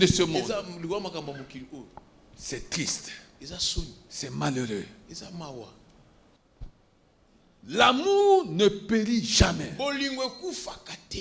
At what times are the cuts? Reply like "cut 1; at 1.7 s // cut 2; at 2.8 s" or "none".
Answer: cut 1; at 6.4 s